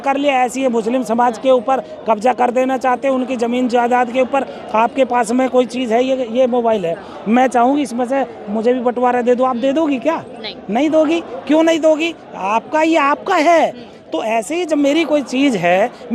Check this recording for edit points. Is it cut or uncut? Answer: uncut